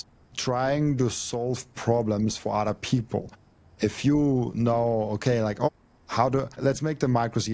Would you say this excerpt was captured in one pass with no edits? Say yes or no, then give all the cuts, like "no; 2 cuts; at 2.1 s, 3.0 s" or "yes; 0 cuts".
yes; 0 cuts